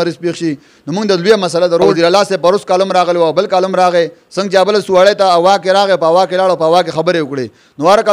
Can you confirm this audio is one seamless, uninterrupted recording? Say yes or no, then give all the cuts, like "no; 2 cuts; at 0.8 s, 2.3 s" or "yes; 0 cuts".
no; 1 cut; at 1.9 s